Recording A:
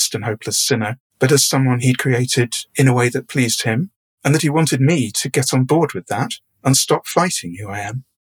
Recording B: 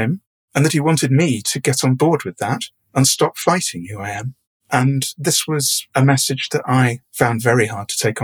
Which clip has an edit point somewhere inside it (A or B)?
A